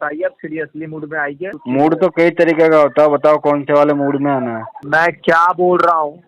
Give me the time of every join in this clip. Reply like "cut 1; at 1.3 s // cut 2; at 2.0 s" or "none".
cut 1; at 1.6 s // cut 2; at 4.8 s